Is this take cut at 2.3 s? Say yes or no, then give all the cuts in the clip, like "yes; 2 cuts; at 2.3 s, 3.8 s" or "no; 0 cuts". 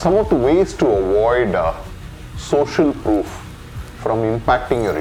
no; 0 cuts